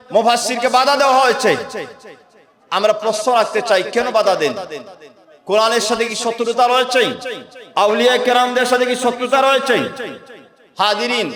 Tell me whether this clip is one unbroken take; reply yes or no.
yes